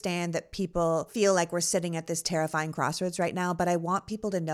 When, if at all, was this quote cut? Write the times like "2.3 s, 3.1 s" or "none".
1.1 s